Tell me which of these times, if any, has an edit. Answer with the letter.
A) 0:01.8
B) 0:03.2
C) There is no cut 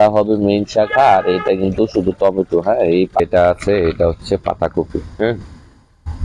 B